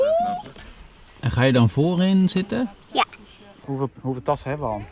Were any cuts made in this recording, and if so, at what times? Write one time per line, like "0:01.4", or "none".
0:03.6